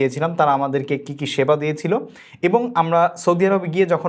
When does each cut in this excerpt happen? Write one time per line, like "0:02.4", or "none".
none